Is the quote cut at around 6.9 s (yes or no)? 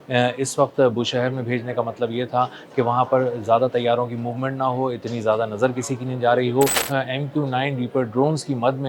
yes